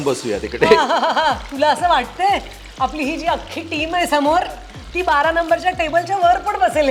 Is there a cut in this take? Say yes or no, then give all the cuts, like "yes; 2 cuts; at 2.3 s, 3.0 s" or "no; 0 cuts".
no; 0 cuts